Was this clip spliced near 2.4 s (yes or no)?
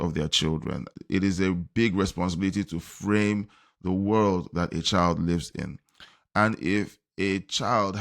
no